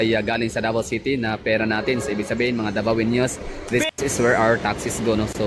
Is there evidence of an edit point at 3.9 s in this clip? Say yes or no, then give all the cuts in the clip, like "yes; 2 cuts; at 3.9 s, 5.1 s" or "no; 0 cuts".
yes; 1 cut; at 3.9 s